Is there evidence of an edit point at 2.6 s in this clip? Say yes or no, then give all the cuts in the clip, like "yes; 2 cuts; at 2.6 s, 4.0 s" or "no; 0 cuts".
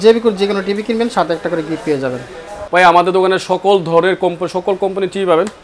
yes; 1 cut; at 2.6 s